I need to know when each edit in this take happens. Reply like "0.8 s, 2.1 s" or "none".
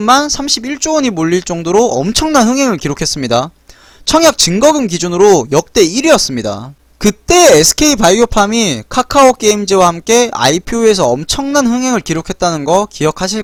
none